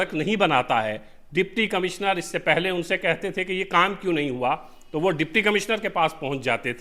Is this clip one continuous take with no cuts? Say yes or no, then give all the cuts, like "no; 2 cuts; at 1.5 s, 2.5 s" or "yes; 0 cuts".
yes; 0 cuts